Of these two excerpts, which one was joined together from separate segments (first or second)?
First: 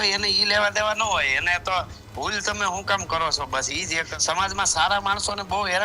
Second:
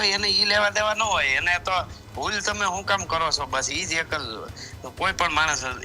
first